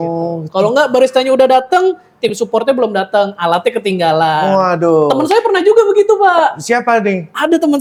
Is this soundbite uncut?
yes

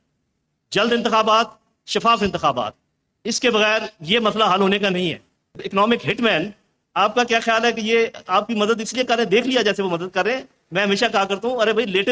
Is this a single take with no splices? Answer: no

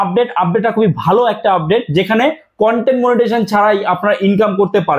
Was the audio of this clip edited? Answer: no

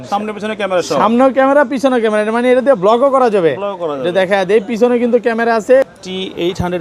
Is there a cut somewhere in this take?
yes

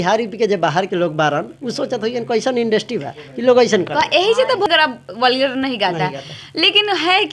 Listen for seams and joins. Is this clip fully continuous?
yes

